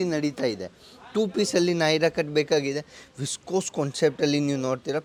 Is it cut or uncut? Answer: uncut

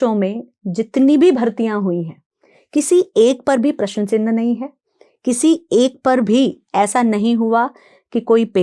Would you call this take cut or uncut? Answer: uncut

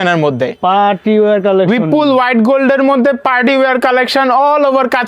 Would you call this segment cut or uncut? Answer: uncut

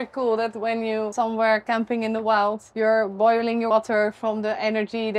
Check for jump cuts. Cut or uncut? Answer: cut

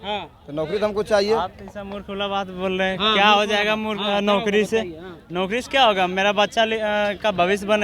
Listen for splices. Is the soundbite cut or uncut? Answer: uncut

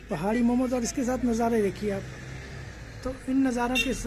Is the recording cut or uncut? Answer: uncut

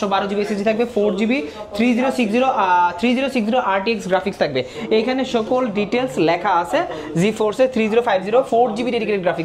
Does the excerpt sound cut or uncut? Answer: uncut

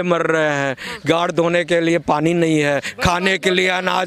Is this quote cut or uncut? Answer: uncut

